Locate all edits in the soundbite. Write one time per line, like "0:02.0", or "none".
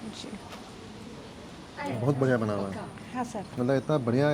0:01.8
0:03.4